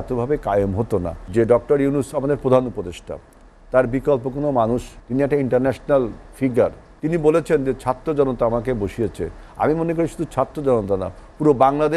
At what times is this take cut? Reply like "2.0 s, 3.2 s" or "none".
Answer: 1.2 s, 5.0 s, 6.9 s